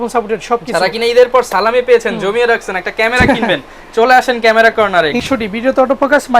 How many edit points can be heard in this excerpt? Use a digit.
1